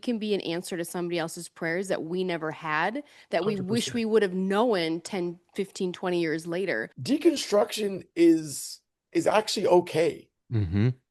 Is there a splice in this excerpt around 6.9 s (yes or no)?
yes